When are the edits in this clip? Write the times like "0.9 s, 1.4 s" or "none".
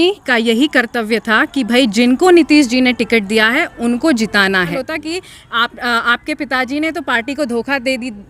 4.7 s